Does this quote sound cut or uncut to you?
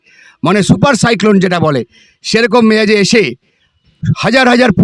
uncut